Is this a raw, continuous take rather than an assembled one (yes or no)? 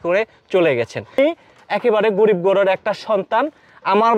no